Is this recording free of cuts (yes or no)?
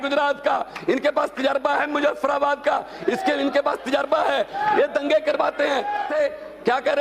no